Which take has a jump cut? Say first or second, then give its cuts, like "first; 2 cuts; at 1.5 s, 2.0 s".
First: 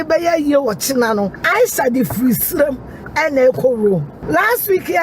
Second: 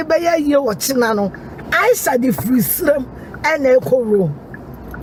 first; 2 cuts; at 1.4 s, 4.1 s